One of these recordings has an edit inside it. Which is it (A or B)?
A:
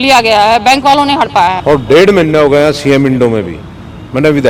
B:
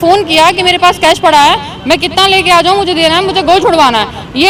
A